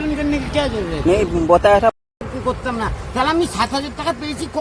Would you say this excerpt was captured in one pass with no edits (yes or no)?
no